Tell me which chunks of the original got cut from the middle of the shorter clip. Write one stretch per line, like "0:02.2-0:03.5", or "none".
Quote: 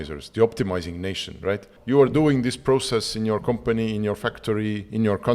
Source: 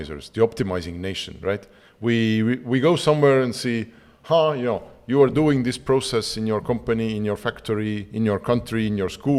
0:01.7-0:04.9